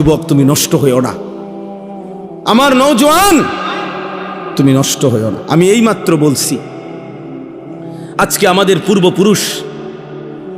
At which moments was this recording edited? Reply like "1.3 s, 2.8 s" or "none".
1.1 s, 2.4 s, 6.6 s, 8.1 s

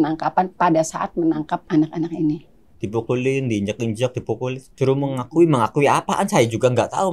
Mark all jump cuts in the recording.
1.6 s, 2.8 s, 4.6 s

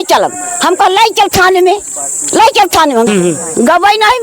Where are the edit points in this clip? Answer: 3.1 s

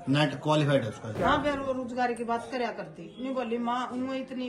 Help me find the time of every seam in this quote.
1.0 s

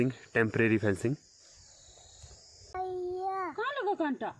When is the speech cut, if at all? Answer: 2.7 s

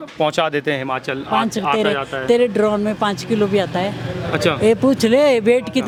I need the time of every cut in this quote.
none

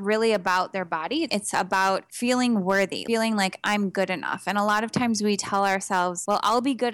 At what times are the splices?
1.3 s, 3.0 s

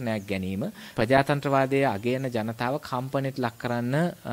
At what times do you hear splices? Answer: 0.9 s

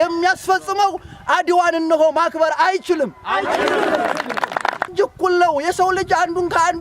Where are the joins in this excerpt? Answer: 4.8 s

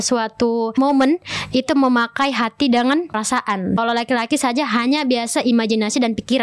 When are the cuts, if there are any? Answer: 0.7 s, 3.3 s

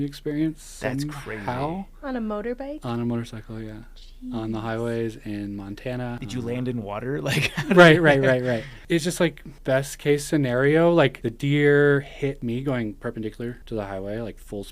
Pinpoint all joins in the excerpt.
6.2 s, 8.8 s, 9.5 s, 11.2 s, 12.4 s, 13.6 s

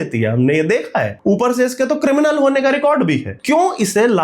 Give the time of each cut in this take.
none

